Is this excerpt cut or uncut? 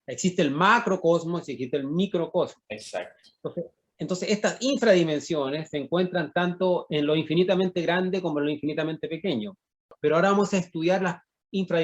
cut